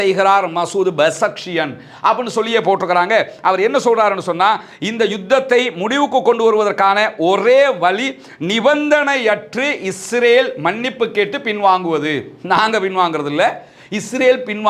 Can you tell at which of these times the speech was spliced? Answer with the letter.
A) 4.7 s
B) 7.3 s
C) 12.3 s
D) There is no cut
D